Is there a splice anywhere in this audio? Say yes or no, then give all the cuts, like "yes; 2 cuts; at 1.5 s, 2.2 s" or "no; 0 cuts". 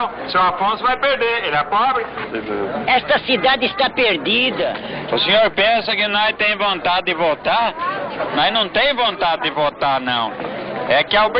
yes; 1 cut; at 4.9 s